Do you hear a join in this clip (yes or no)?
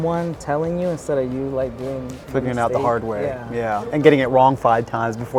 no